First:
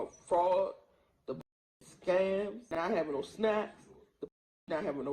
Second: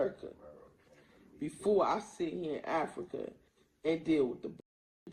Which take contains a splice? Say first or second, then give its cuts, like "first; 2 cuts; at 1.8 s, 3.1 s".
first; 1 cut; at 2.6 s